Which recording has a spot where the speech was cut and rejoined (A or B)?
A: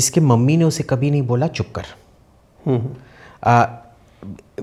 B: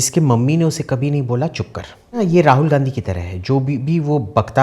B